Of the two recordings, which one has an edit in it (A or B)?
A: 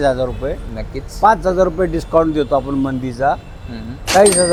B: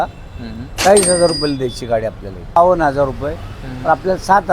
B